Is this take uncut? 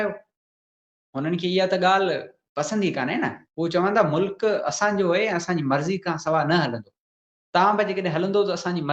yes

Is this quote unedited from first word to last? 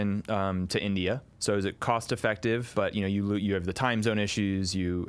no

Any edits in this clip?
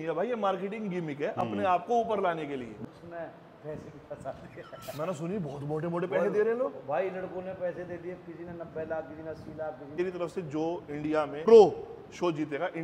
yes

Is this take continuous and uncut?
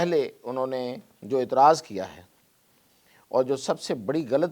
yes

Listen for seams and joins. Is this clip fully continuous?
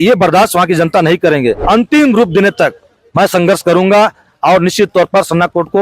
no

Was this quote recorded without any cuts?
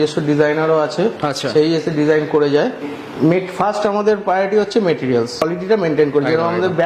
no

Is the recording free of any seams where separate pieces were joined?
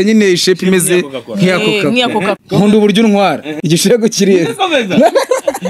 no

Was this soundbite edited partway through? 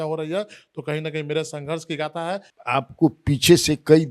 yes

